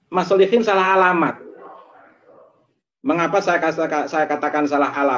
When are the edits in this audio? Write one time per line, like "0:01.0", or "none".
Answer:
none